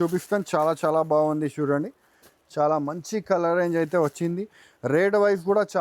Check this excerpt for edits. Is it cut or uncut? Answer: uncut